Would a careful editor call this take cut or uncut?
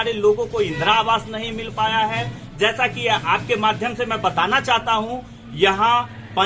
uncut